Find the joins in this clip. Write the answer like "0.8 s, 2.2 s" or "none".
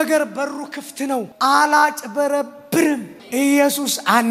1.3 s